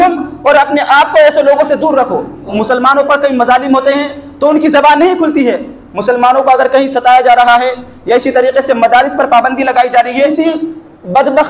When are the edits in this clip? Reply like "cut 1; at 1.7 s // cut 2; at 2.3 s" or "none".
cut 1; at 2.5 s // cut 2; at 10.3 s